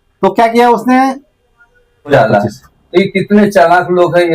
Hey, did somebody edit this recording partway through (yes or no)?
yes